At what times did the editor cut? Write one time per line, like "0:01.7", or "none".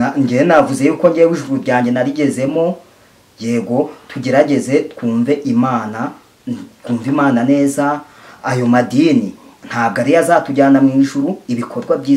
none